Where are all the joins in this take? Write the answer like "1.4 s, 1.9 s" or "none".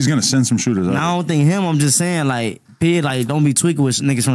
none